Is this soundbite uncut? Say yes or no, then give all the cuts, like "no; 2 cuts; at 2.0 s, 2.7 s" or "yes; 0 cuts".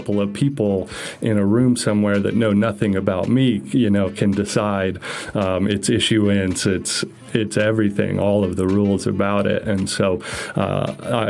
yes; 0 cuts